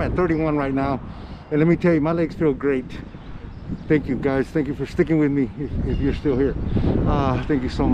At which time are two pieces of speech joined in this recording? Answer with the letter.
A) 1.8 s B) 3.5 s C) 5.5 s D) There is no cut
B